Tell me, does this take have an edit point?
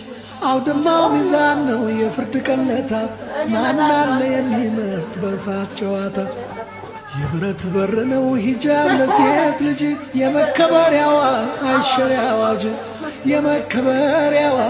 no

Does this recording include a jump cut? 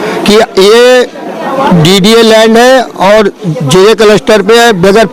no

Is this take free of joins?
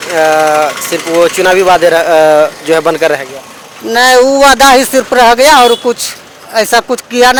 yes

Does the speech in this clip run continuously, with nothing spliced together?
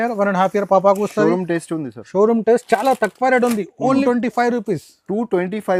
yes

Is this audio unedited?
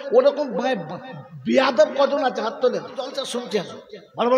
no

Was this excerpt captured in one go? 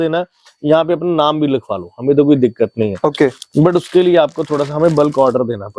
yes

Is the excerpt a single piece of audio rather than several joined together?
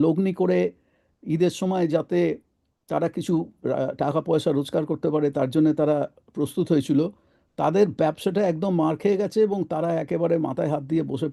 yes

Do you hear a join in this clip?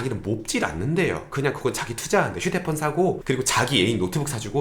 yes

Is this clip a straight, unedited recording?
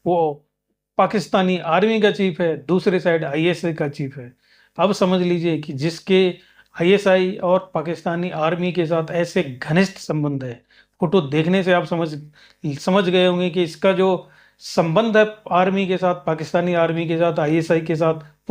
yes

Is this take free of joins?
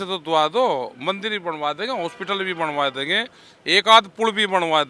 yes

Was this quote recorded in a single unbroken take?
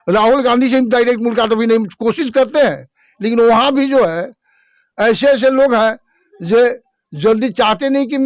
yes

